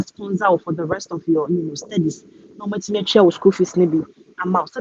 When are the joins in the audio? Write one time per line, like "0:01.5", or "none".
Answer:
none